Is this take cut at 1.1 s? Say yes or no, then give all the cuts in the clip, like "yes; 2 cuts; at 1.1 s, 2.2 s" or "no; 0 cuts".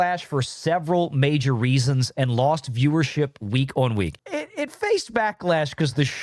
no; 1 cut; at 4.2 s